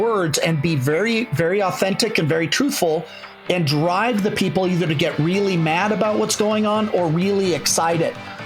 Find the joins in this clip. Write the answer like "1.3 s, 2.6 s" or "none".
none